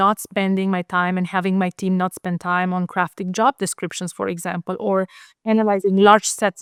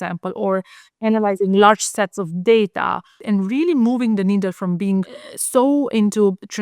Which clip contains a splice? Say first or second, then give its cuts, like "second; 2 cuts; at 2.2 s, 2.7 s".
second; 2 cuts; at 3.2 s, 5.2 s